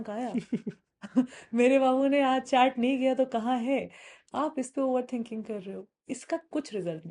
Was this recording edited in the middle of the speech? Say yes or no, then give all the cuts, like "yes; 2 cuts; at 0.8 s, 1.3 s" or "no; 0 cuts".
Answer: no; 0 cuts